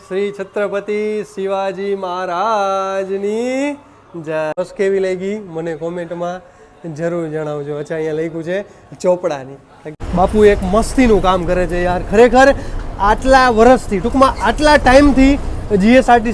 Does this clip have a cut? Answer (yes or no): yes